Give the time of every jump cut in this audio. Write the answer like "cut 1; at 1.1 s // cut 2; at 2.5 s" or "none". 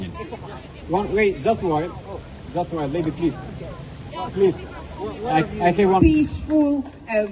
cut 1; at 6.0 s